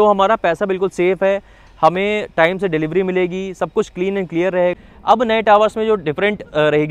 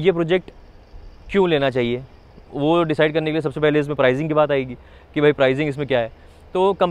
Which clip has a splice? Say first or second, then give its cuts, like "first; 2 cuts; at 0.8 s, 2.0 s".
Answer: first; 1 cut; at 4.9 s